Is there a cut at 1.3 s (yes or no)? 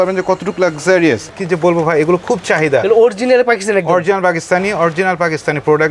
yes